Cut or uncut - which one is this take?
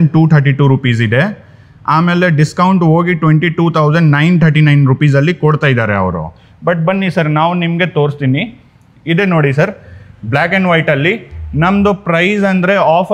uncut